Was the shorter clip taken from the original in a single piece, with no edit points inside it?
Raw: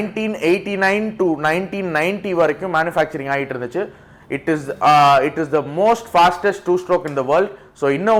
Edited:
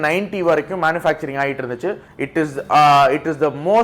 no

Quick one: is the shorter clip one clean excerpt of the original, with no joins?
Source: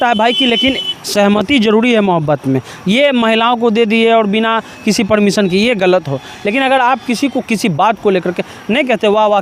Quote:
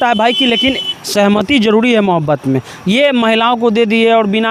yes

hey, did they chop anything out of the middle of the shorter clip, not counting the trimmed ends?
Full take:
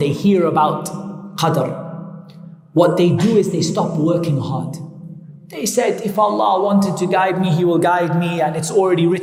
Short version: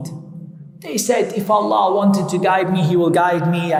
no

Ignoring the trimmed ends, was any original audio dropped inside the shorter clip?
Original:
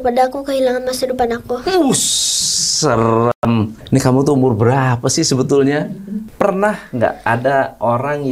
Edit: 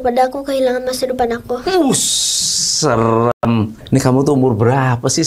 no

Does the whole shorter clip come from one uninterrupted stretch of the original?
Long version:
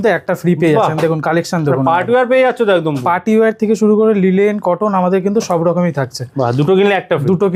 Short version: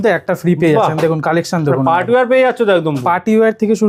yes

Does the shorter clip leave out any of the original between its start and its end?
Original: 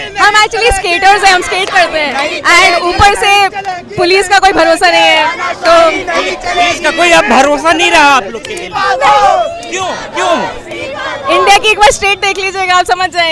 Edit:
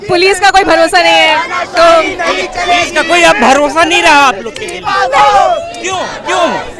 no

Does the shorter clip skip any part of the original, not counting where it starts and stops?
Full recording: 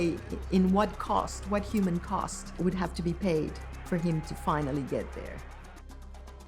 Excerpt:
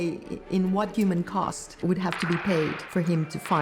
yes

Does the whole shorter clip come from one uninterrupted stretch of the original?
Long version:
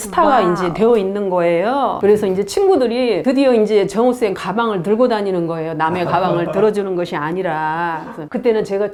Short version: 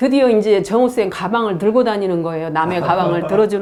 yes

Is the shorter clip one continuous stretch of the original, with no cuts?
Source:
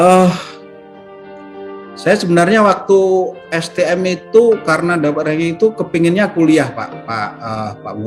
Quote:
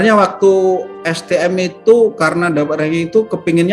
yes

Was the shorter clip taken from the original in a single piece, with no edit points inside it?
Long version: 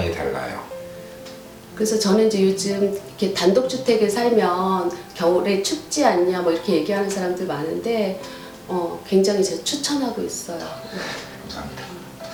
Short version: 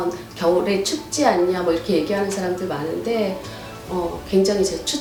yes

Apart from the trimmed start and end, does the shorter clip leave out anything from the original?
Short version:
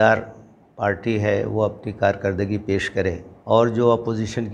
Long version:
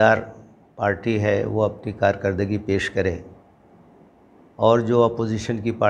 yes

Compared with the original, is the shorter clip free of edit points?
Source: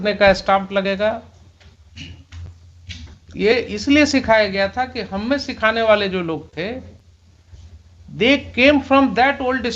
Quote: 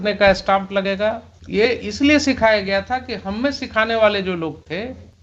no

